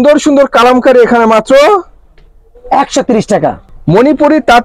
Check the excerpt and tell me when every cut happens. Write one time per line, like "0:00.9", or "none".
0:03.7